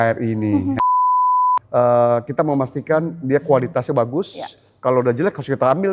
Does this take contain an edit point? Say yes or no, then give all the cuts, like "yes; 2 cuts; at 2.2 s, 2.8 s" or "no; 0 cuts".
yes; 1 cut; at 1.2 s